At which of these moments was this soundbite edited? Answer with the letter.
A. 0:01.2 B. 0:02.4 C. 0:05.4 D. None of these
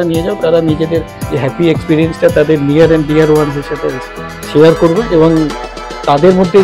A